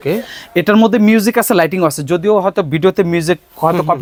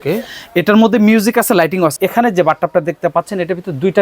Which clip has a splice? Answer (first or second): second